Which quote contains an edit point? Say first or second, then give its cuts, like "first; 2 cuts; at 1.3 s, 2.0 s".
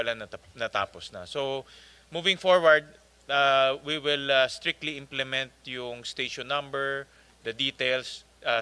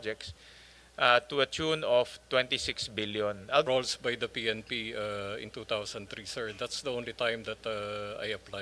second; 1 cut; at 3.6 s